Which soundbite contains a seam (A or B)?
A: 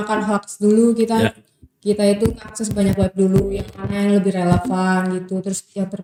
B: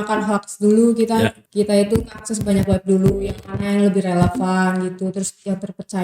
B